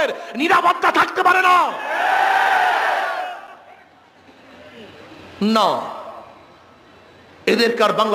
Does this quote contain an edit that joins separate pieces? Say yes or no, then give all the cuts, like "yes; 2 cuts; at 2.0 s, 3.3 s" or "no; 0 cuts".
no; 0 cuts